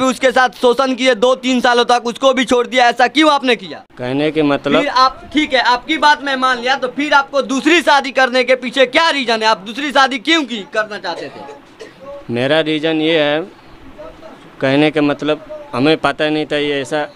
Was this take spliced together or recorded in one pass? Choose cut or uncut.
uncut